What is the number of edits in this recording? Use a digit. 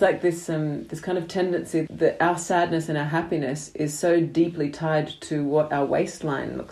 1